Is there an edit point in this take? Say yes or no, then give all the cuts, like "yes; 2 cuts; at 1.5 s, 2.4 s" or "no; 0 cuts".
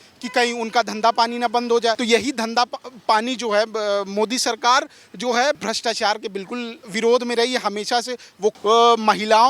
yes; 4 cuts; at 2.0 s, 5.6 s, 6.8 s, 8.6 s